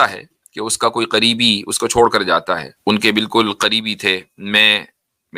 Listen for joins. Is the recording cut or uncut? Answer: cut